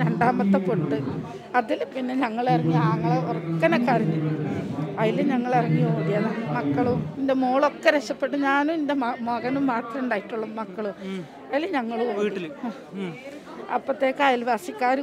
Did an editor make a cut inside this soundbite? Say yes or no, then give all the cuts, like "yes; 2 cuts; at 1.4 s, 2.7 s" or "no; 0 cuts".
no; 0 cuts